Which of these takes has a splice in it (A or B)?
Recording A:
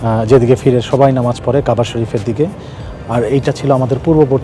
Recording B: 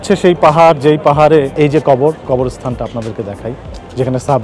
B